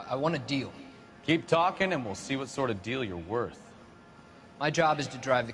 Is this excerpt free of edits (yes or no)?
yes